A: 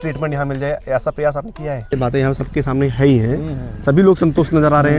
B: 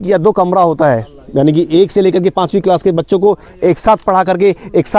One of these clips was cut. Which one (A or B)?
A